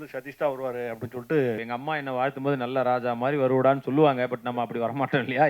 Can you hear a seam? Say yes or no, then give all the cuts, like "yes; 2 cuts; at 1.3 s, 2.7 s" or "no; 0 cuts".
yes; 1 cut; at 1.6 s